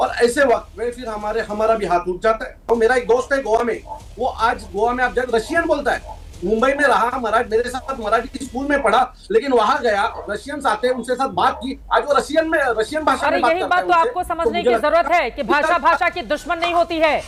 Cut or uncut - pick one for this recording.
uncut